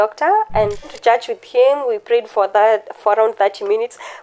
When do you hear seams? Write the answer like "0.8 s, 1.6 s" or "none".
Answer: 1.0 s